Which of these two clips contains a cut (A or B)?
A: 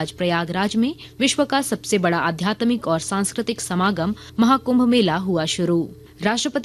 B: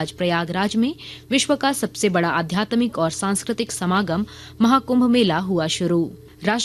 A